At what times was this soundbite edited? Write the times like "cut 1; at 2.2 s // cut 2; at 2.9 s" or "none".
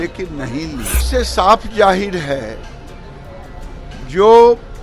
cut 1; at 1.0 s